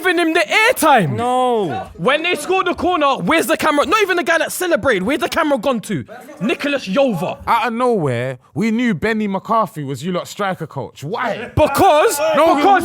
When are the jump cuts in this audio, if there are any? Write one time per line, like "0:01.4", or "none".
0:01.6
0:07.4

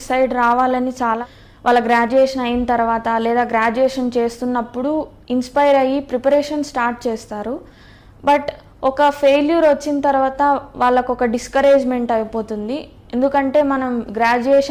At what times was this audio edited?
0:01.2

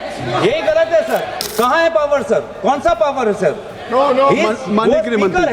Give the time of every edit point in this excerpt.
0:01.4

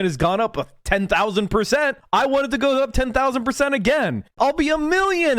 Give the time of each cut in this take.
0:04.3

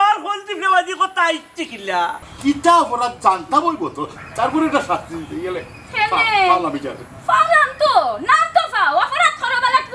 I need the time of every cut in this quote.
0:02.2

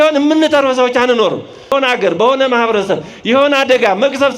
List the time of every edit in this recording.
0:01.7

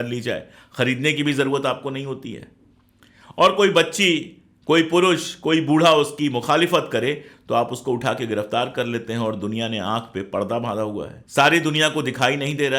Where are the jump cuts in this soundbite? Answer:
0:11.1

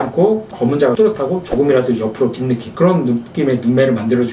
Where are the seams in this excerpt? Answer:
0:02.7

